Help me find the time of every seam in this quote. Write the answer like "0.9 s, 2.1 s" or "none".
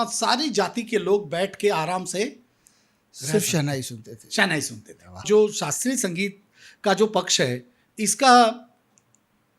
5.2 s